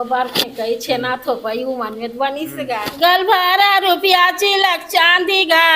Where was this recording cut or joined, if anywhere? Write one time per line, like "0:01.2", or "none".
0:02.9